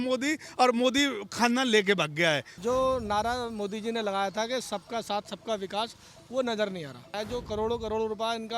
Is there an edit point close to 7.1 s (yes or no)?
yes